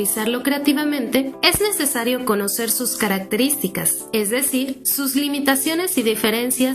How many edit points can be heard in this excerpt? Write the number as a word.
three